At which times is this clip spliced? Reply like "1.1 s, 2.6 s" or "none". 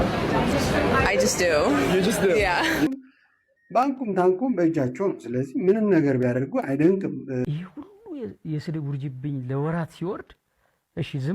2.9 s, 7.4 s

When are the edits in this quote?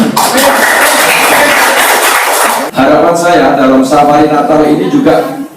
2.6 s

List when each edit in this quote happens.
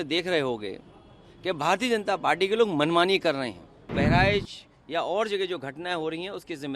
3.9 s

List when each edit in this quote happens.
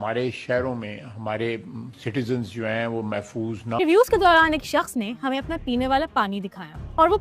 3.6 s

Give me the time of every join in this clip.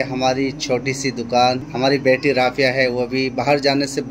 1.7 s

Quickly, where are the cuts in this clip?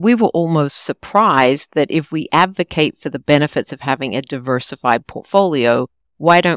none

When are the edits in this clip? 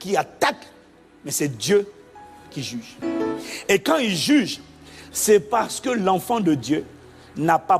2.9 s

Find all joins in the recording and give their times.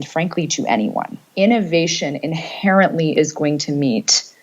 1.2 s

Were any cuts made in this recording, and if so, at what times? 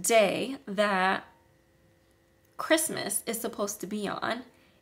none

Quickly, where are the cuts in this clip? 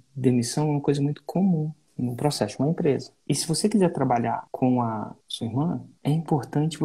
1.8 s, 3.1 s, 4.5 s, 5.2 s, 5.9 s

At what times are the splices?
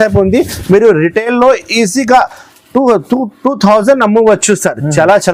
none

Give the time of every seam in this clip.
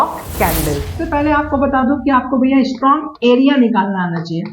0.9 s

